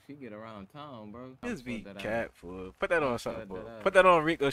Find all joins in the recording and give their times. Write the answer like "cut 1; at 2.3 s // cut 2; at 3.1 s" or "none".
cut 1; at 1.4 s